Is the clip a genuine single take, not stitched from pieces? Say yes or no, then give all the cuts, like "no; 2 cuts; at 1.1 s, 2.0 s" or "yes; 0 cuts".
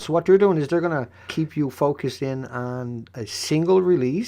no; 1 cut; at 1.2 s